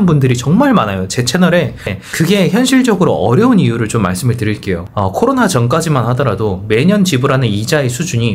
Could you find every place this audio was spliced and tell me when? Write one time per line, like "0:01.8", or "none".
0:01.9
0:04.9